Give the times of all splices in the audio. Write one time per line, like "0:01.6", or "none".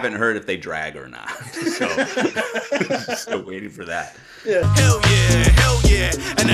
0:04.6